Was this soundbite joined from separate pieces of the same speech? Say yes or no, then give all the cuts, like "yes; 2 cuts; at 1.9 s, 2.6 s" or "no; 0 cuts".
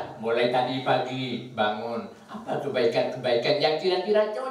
no; 0 cuts